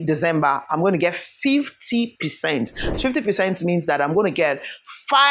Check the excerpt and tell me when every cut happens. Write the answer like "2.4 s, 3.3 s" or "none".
3.0 s

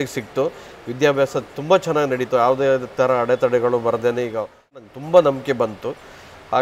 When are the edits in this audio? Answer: 4.8 s

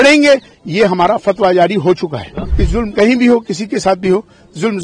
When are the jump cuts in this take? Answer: 2.4 s

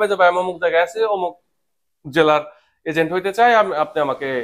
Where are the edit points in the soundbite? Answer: none

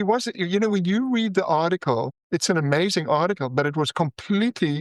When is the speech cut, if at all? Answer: 2.2 s

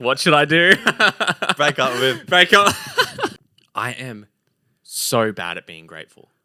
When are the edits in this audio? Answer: 3.4 s

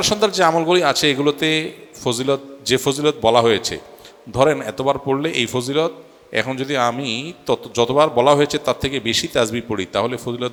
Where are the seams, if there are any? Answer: none

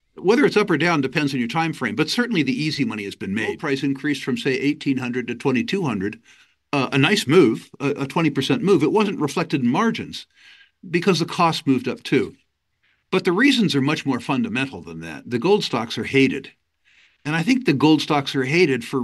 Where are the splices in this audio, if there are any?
3.6 s

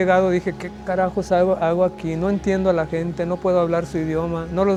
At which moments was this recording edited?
none

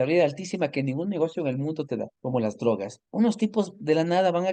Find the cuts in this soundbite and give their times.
2.1 s, 3.0 s

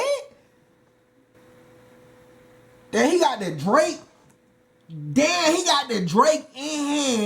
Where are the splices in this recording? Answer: 1.4 s

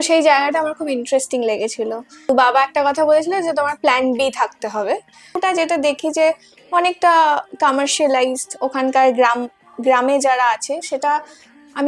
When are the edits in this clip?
2.3 s, 5.4 s

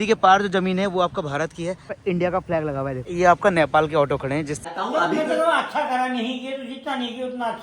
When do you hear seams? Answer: 1.9 s, 3.1 s, 4.6 s

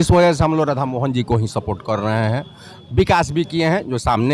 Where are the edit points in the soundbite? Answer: none

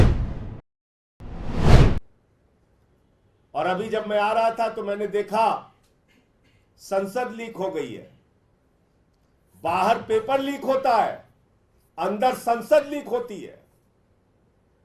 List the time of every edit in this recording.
2.1 s

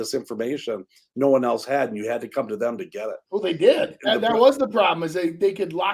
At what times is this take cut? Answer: none

